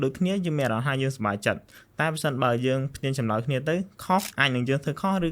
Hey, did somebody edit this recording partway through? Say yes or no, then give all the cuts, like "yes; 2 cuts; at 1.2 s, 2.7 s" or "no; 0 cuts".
yes; 1 cut; at 4.3 s